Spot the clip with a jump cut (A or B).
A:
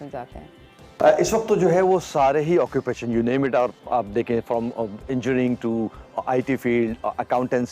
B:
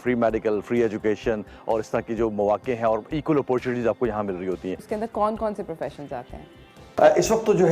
B